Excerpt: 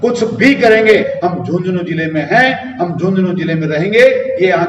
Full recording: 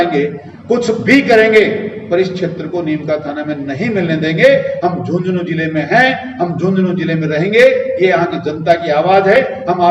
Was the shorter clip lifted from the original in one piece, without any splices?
no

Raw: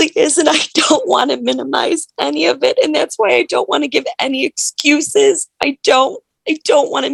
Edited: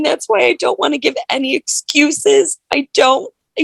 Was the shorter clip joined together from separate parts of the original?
no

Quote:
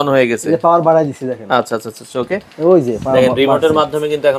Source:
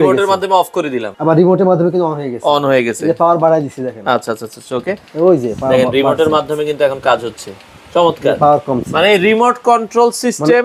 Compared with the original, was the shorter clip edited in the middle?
no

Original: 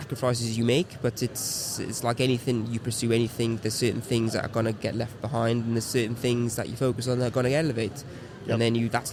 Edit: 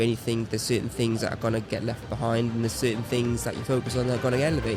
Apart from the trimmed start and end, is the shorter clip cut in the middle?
no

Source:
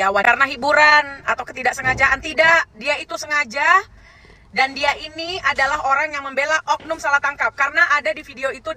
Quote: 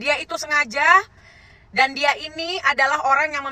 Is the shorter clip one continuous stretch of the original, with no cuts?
yes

